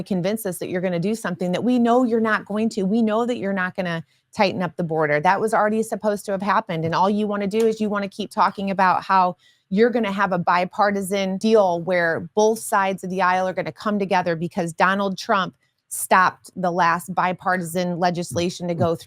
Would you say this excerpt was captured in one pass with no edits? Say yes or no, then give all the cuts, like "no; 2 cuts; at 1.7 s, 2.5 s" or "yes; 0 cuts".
no; 1 cut; at 11.4 s